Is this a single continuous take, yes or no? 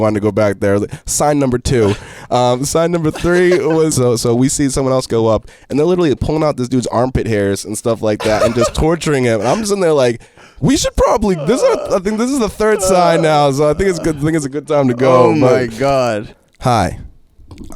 no